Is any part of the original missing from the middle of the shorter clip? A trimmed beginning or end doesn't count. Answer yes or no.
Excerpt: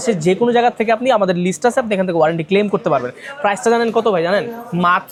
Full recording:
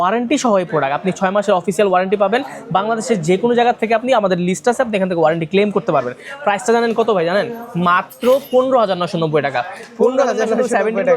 no